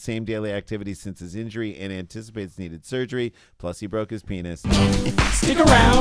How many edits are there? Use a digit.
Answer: 1